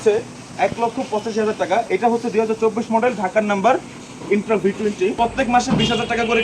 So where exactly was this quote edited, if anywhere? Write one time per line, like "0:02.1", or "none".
0:05.2